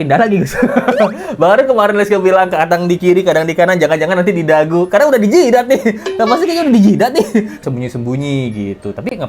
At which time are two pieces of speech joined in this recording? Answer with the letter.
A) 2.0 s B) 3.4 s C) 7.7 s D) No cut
C